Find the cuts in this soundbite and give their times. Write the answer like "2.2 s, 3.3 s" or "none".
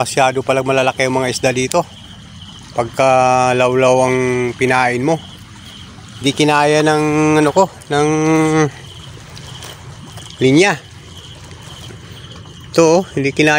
none